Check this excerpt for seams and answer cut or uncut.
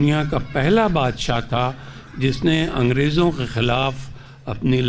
uncut